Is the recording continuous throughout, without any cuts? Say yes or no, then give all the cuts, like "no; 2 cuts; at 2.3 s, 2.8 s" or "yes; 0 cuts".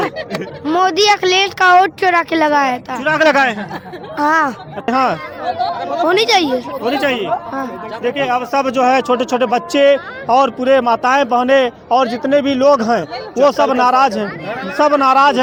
yes; 0 cuts